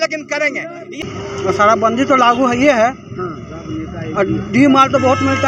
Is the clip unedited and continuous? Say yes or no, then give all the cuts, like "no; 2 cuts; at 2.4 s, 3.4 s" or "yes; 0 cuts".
no; 1 cut; at 1.0 s